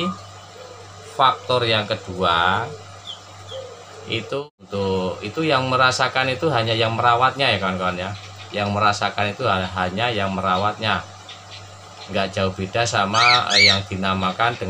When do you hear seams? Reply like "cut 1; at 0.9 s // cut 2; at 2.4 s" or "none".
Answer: cut 1; at 4.4 s